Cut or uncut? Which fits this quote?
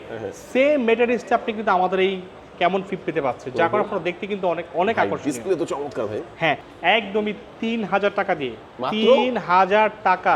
cut